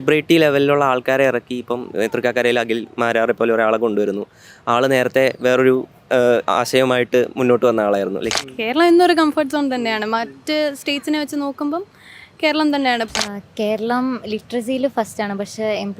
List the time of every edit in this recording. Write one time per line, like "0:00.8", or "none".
0:08.3
0:13.1